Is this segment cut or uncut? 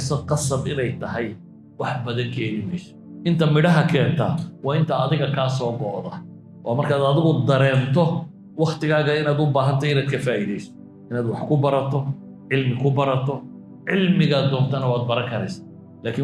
uncut